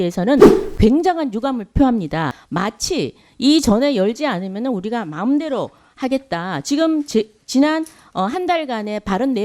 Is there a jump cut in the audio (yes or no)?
yes